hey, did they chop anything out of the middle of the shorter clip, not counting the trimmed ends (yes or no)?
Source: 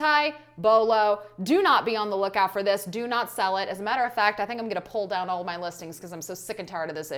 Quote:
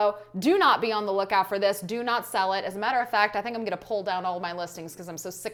no